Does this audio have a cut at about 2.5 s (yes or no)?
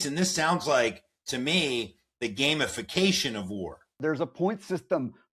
no